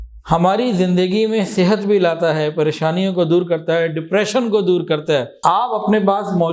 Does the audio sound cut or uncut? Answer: cut